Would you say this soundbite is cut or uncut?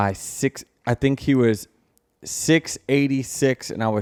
uncut